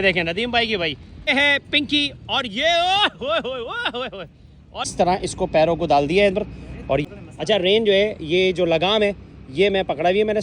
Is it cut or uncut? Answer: cut